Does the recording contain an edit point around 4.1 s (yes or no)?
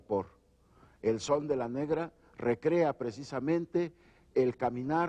no